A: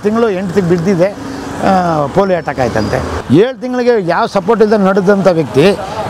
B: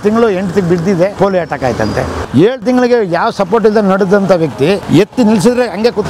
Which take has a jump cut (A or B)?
B